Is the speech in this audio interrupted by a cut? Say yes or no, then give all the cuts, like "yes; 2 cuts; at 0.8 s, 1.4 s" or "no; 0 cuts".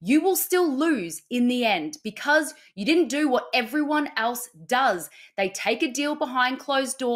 yes; 1 cut; at 2.6 s